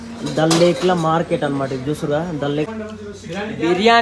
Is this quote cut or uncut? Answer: cut